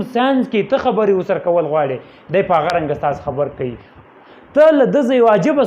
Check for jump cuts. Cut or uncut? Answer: cut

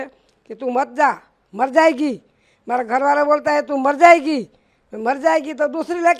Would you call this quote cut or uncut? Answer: uncut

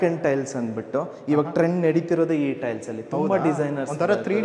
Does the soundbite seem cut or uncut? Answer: uncut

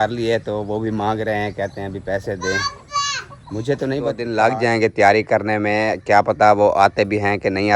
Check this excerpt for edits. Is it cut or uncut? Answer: cut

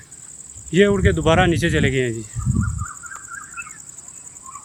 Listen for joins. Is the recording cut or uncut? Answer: uncut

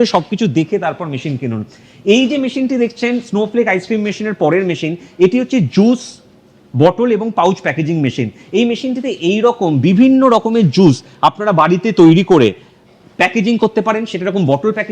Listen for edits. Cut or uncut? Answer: uncut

